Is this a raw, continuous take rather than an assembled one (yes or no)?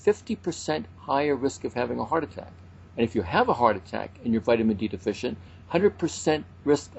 yes